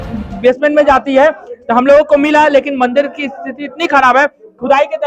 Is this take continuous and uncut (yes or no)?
yes